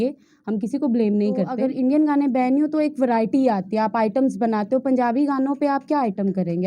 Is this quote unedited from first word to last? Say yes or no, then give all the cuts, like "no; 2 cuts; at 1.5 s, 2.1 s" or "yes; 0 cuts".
no; 1 cut; at 1.6 s